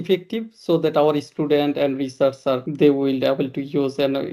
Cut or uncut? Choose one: cut